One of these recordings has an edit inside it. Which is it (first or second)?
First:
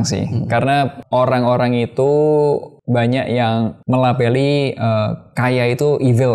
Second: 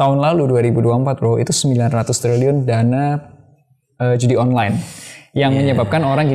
first